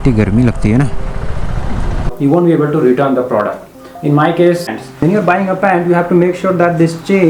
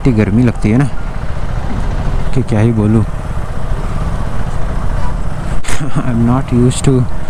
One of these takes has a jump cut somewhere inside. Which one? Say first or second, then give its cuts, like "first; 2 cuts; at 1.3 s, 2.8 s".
first; 2 cuts; at 2.1 s, 4.7 s